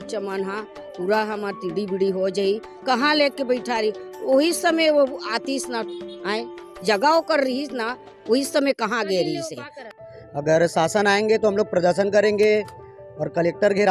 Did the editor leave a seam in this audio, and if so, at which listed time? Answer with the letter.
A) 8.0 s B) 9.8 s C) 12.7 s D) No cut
B